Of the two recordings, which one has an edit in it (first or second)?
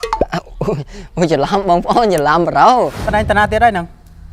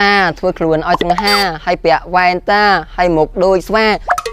first